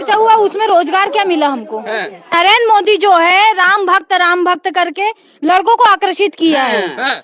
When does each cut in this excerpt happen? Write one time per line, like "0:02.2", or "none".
0:02.3